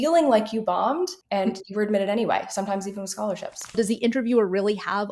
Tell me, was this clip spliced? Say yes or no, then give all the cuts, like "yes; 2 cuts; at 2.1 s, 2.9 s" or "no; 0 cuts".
yes; 2 cuts; at 1.2 s, 3.7 s